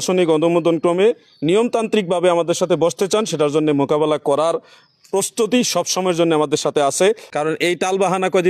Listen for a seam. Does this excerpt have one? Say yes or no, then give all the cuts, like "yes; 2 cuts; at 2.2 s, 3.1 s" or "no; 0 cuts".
yes; 1 cut; at 7.3 s